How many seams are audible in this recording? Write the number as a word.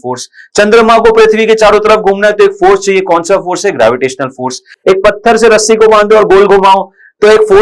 zero